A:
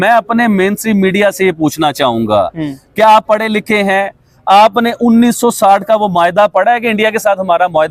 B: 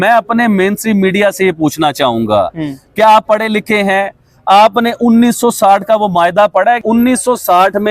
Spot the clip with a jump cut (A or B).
B